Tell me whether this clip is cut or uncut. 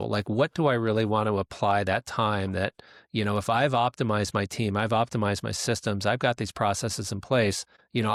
uncut